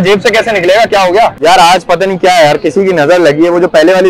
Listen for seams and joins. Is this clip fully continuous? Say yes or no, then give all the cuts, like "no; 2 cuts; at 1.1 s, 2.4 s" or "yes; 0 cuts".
no; 1 cut; at 1.4 s